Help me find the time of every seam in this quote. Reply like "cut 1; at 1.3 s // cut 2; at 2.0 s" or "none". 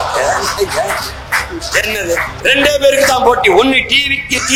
cut 1; at 2.3 s